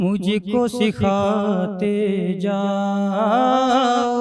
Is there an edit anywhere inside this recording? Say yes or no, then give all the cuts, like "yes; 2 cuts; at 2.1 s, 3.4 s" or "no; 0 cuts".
no; 0 cuts